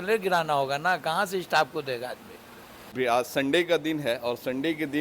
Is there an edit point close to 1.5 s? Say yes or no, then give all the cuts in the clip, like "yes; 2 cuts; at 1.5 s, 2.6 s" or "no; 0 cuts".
no; 1 cut; at 2.9 s